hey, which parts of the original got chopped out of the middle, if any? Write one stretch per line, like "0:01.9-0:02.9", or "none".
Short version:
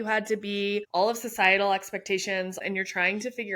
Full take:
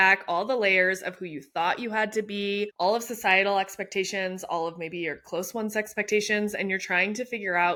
0:04.5-0:06.5